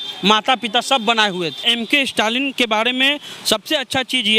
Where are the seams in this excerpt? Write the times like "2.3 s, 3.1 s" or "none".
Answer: 1.7 s